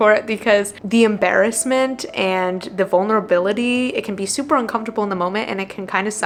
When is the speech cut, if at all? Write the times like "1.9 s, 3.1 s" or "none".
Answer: none